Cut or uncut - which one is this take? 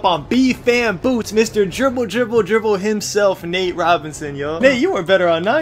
cut